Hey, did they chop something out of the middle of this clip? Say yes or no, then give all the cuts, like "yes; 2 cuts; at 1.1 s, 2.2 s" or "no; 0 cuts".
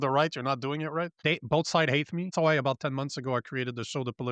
yes; 2 cuts; at 1.2 s, 2.3 s